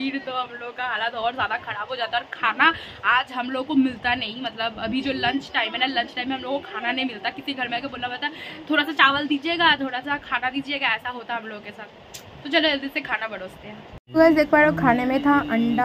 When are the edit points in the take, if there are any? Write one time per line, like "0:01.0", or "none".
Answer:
none